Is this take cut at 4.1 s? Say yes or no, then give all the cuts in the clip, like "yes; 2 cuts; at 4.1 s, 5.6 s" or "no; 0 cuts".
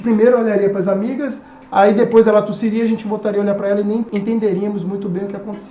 yes; 1 cut; at 4.1 s